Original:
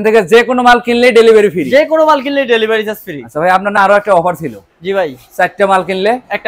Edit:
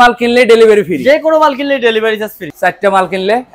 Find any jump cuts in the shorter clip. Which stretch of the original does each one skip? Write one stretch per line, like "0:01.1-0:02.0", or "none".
0:03.1-0:05.2